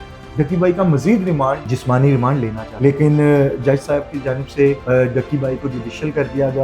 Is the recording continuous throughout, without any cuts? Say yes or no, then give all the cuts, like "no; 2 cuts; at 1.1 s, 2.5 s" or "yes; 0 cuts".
no; 3 cuts; at 1.6 s, 2.6 s, 4.8 s